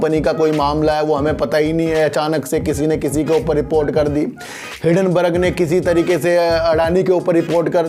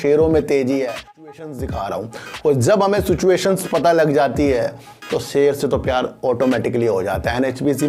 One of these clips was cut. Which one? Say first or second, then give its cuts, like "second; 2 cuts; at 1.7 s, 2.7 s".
second; 1 cut; at 1.3 s